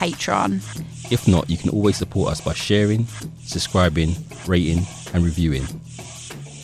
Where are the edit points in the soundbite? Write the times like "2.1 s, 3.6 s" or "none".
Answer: 5.7 s